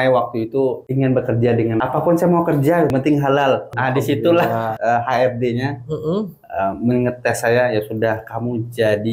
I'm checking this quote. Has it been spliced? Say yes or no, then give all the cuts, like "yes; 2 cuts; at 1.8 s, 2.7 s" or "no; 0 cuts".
yes; 5 cuts; at 0.8 s, 1.8 s, 2.9 s, 3.7 s, 4.7 s